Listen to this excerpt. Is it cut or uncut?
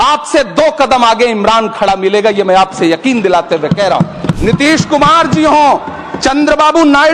cut